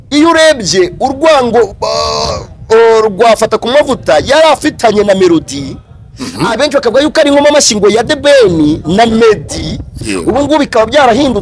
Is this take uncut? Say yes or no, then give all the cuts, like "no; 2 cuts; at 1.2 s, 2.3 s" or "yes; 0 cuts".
yes; 0 cuts